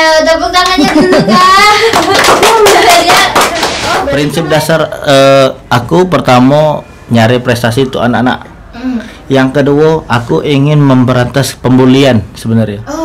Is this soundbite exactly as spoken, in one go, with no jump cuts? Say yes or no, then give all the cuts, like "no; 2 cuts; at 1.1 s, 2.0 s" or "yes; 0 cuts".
no; 1 cut; at 4.0 s